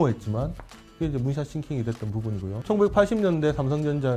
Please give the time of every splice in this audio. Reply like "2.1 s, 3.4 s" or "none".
2.6 s